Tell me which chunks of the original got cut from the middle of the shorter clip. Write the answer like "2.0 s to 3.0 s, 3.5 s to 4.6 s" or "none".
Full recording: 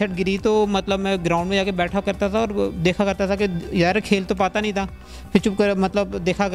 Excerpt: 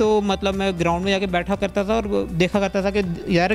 none